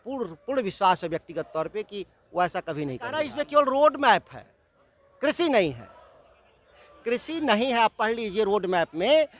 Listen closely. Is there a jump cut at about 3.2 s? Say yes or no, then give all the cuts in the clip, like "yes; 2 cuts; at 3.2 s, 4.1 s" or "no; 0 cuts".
yes; 1 cut; at 3.2 s